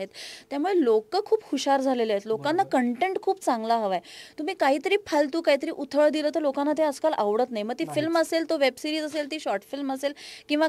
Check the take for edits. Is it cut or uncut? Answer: uncut